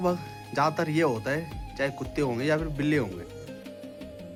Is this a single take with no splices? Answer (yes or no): yes